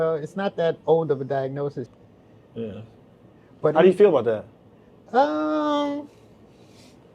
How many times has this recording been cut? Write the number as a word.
one